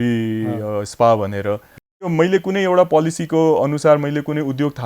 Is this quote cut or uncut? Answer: cut